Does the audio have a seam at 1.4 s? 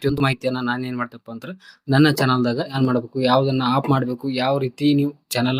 no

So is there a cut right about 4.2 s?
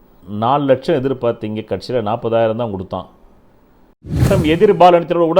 yes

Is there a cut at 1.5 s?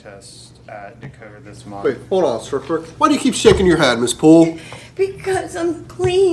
yes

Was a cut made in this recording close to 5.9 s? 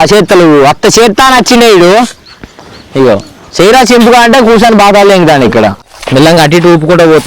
yes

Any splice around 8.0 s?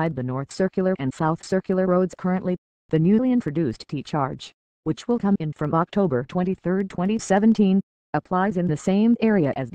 yes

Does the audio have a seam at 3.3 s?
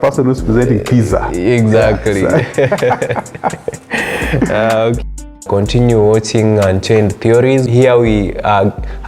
no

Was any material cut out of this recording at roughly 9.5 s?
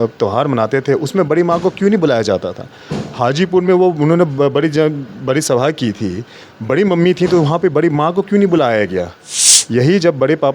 yes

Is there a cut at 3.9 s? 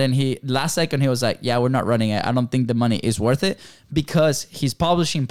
no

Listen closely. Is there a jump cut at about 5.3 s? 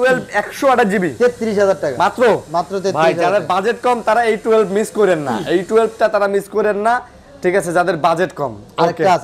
no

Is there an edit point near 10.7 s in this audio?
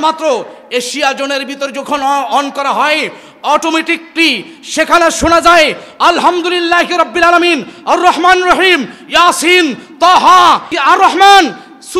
yes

